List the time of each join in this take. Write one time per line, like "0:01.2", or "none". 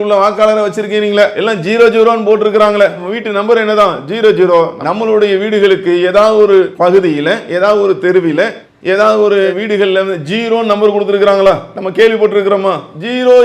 0:01.4